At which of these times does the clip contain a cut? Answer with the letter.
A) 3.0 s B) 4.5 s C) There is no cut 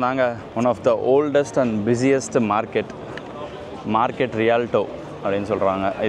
C